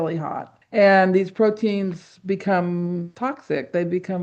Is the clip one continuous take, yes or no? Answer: no